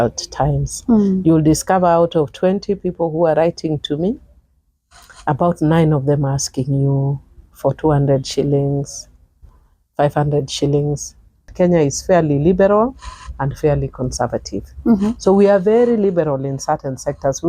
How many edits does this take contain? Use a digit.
1